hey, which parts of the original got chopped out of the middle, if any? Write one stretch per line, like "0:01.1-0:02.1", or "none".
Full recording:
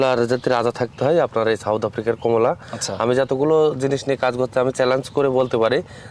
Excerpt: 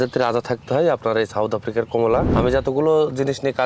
0:02.6-0:02.9

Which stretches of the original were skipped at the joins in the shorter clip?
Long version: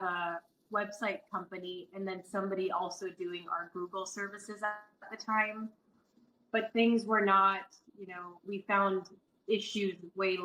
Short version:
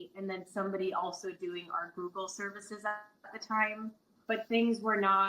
0:05.8-0:06.3

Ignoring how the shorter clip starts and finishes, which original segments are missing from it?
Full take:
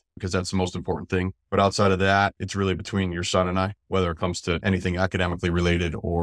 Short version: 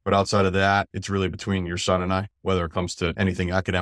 none

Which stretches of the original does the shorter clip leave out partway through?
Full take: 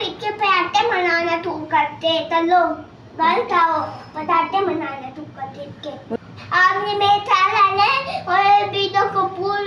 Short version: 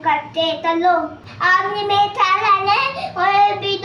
0:02.9-0:06.4

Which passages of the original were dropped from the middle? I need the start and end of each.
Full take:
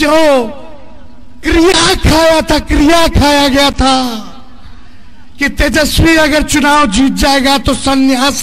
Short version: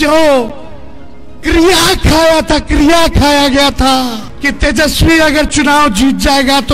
0:04.3-0:05.2

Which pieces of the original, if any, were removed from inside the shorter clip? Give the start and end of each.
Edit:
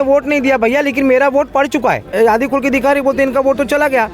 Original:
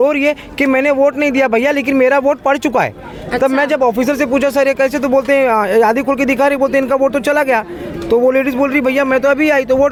0:03.0-0:05.7

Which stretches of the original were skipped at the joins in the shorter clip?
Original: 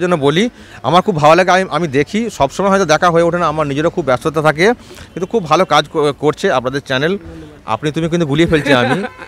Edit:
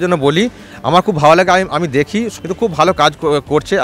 0:02.3-0:05.0

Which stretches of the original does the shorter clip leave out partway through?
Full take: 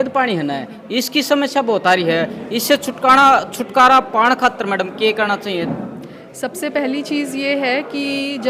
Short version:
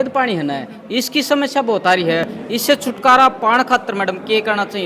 0:02.7-0:03.4

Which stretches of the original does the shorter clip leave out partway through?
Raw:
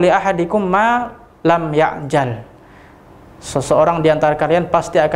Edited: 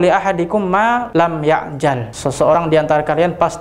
0:01.1-0:01.4
0:02.8-0:03.9

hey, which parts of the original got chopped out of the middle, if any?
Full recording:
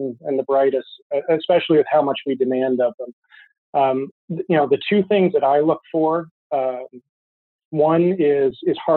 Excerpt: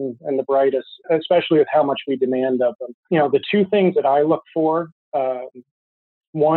0:01.0-0:01.2
0:03.1-0:04.3

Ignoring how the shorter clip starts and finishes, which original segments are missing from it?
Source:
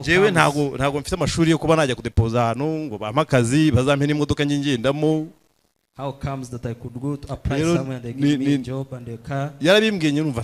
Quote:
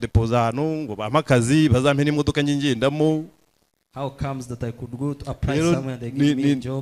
none

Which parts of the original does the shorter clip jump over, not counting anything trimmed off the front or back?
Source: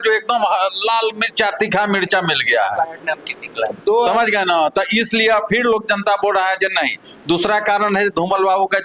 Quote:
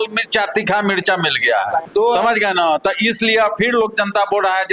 0:02.9-0:03.8

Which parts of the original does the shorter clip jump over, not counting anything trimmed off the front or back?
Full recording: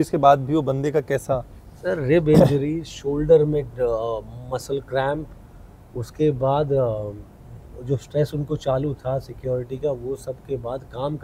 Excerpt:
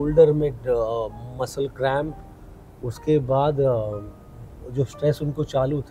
none

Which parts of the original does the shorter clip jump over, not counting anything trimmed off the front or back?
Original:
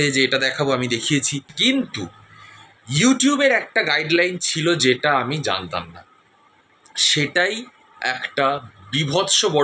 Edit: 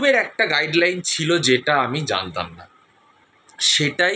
none

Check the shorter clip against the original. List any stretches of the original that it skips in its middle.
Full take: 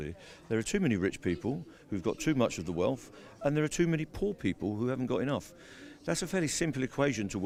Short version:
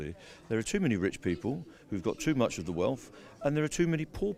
none

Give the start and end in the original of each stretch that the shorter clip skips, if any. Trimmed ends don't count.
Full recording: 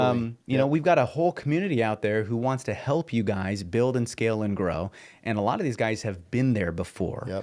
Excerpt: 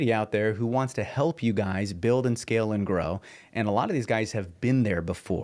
none

